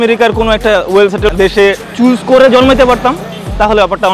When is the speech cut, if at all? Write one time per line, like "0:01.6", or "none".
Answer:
0:01.3